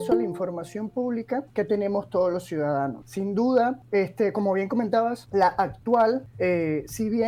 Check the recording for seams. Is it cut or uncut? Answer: cut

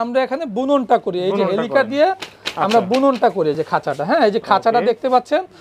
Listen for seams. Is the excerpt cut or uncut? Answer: uncut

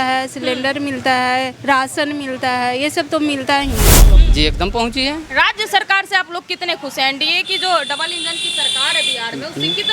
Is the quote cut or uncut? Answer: cut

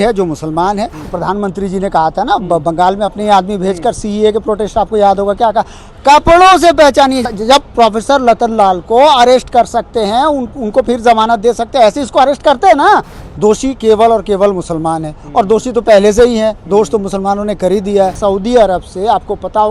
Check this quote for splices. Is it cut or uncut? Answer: cut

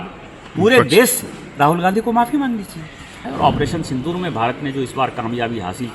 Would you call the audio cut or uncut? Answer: cut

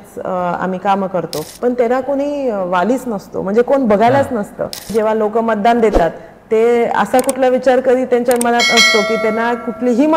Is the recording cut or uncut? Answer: cut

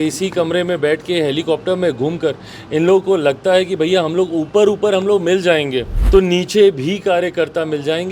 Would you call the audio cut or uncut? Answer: cut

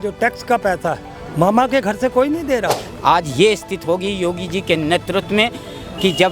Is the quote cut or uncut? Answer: cut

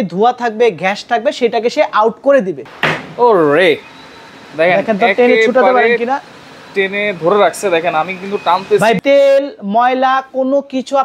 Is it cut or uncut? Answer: cut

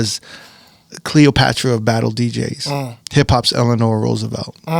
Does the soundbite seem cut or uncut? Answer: cut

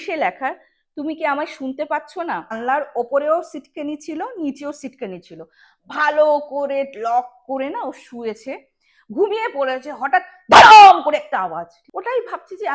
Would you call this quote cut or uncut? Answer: cut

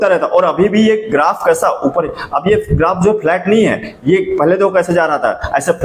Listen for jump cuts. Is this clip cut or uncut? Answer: uncut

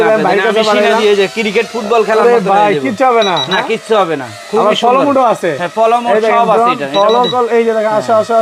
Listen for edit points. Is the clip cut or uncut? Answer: uncut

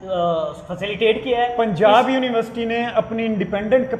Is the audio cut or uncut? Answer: uncut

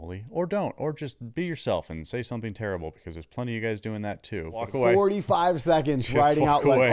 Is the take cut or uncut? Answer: cut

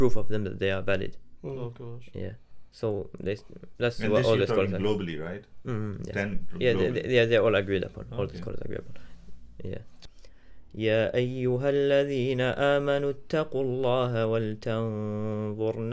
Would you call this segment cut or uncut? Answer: cut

